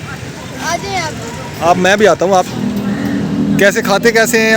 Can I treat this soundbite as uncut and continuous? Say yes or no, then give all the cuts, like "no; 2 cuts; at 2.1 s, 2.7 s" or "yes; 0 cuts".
no; 1 cut; at 2.5 s